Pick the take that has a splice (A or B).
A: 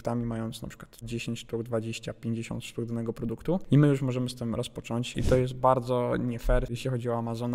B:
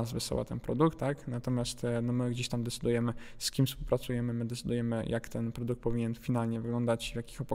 A